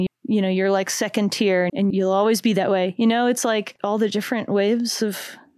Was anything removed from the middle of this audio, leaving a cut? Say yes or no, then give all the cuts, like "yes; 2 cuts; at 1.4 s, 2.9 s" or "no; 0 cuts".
yes; 1 cut; at 3.7 s